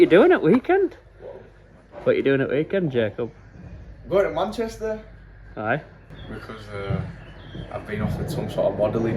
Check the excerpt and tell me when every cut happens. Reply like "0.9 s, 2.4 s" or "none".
none